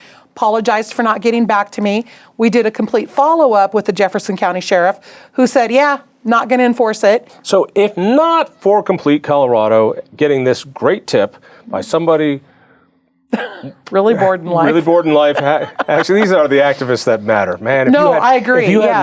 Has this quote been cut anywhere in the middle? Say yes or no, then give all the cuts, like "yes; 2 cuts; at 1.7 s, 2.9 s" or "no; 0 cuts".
yes; 1 cut; at 7.3 s